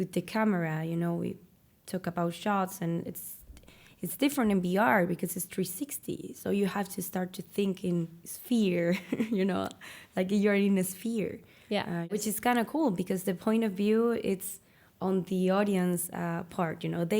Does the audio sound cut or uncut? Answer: cut